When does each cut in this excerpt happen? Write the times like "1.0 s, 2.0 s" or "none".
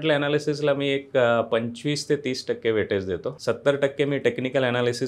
3.3 s

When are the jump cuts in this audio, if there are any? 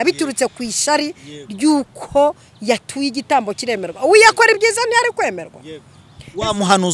none

